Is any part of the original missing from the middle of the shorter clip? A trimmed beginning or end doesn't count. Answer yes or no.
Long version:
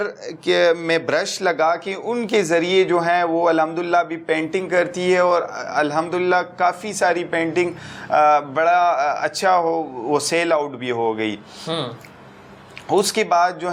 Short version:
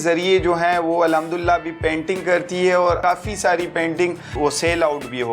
yes